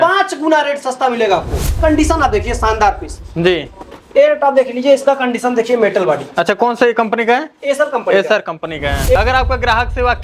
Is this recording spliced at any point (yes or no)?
yes